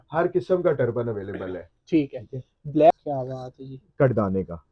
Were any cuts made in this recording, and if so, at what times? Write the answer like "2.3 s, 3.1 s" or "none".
2.9 s